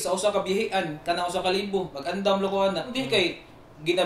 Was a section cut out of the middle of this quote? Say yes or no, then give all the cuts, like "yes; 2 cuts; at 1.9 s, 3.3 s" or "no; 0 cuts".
yes; 2 cuts; at 2.0 s, 2.9 s